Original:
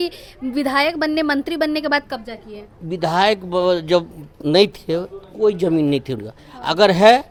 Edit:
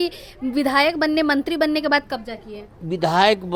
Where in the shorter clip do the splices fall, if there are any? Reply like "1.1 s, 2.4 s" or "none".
none